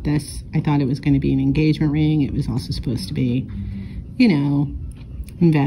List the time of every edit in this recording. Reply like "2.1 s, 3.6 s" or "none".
none